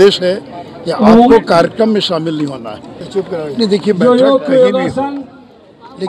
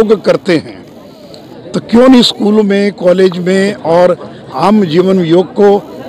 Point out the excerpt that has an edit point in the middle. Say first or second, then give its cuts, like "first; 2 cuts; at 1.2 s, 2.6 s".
first; 1 cut; at 3.1 s